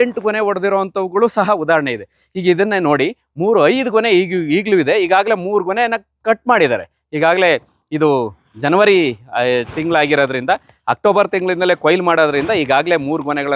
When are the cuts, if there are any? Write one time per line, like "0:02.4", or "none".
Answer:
none